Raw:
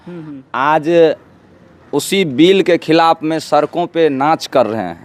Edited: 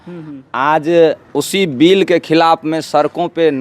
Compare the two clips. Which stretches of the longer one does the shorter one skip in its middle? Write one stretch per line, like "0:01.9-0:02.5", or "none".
0:01.2-0:01.8